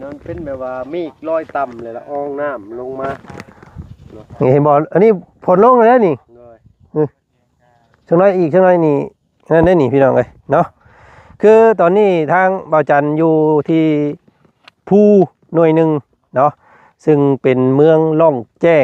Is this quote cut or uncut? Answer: uncut